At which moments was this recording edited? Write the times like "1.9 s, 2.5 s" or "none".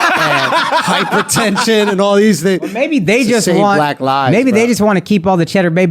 2.6 s